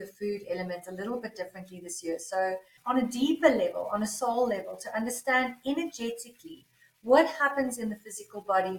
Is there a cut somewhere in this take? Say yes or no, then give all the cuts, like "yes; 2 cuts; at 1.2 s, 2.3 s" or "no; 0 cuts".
yes; 1 cut; at 2.7 s